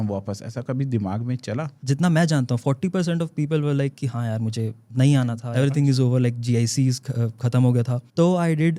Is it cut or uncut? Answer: cut